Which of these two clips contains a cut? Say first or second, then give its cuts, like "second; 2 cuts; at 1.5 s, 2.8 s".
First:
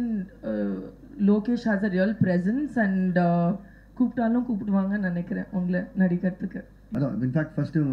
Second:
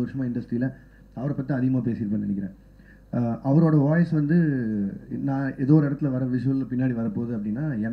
first; 1 cut; at 6.9 s